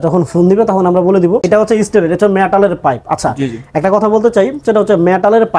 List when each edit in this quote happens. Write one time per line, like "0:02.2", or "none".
0:01.4